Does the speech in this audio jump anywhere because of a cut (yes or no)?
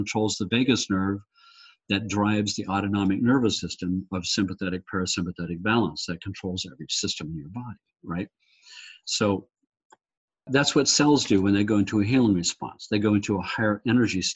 yes